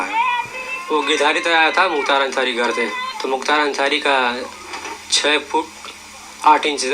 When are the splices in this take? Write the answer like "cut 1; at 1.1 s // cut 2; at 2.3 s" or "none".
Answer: cut 1; at 3.1 s